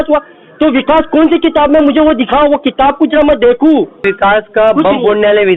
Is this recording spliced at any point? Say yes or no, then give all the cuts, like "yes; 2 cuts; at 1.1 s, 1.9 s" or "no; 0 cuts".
yes; 1 cut; at 4.0 s